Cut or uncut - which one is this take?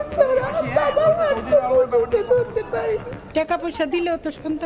cut